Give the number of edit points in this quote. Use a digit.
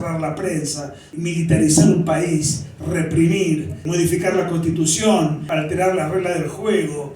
3